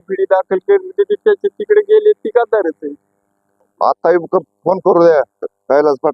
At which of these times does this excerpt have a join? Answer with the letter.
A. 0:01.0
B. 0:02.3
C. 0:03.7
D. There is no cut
C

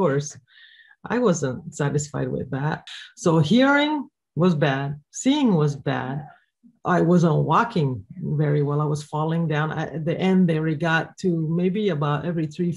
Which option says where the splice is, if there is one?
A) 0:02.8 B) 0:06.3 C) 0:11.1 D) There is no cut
A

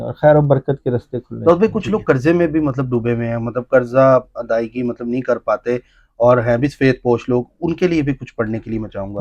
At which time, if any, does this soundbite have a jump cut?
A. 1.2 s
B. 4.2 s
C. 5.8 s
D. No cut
A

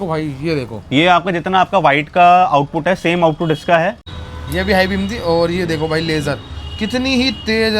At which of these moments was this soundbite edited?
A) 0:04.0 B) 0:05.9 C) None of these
A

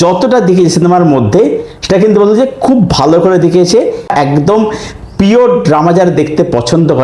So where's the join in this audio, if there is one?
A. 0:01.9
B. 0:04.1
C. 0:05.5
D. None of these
B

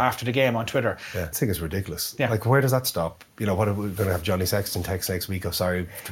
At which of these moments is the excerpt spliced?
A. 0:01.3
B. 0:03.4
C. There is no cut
A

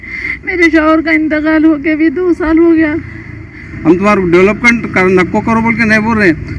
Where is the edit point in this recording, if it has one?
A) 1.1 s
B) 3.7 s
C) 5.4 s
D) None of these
B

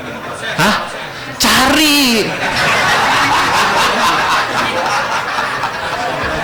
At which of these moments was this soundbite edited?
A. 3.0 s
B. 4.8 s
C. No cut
C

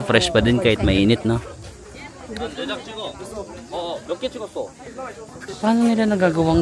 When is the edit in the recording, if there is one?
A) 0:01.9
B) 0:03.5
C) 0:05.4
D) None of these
D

